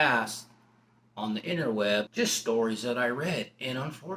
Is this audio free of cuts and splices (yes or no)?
no